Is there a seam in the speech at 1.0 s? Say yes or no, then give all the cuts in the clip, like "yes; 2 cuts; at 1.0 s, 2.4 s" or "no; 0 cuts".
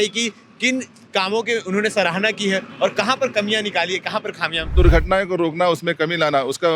no; 1 cut; at 4.7 s